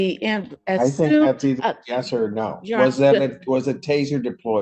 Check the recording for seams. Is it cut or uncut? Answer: uncut